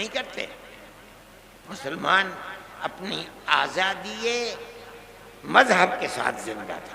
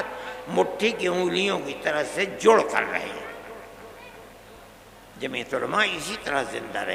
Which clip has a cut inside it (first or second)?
first